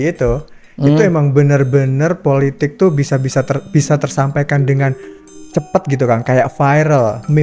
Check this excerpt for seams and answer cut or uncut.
uncut